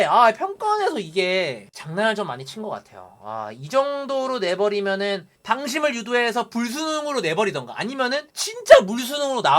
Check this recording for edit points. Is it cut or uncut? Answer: uncut